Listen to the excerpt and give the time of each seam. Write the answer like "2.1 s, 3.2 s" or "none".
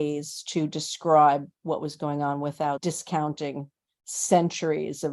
2.8 s